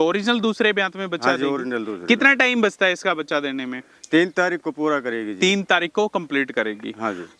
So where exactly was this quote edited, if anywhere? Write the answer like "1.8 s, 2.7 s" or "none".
none

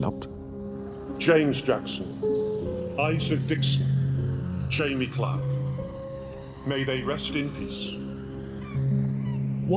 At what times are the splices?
7.3 s

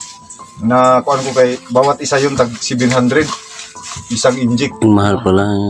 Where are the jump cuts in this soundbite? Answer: none

